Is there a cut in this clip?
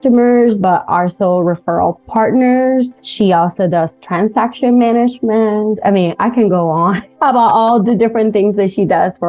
yes; 3 cuts; at 3.0 s, 5.8 s, 7.1 s

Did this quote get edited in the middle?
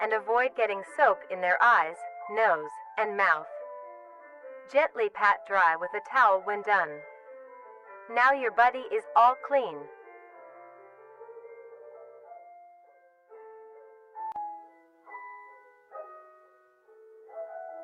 no; 0 cuts

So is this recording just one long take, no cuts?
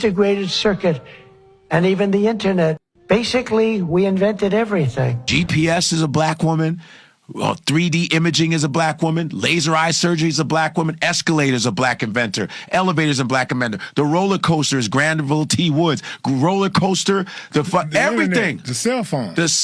no; 1 cut; at 5.2 s

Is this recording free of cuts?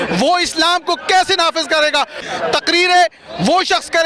no; 1 cut; at 2.2 s

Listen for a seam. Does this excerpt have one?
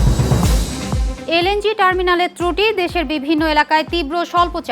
yes; 1 cut; at 1.1 s

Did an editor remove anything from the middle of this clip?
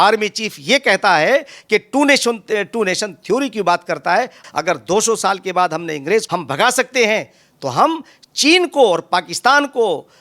yes; 2 cuts; at 4.4 s, 6.3 s

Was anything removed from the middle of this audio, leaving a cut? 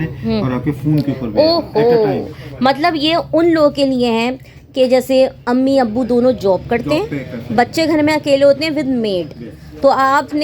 no; 0 cuts

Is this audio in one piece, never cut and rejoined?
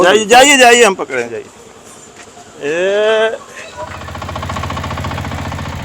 no; 1 cut; at 4.0 s

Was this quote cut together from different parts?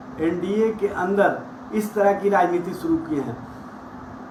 no; 0 cuts

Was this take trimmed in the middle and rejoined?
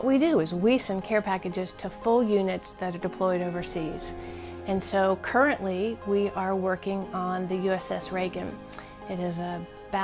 no; 0 cuts

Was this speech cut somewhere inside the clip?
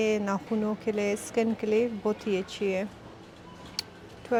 no; 0 cuts

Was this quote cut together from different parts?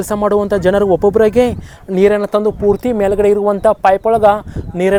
no; 0 cuts

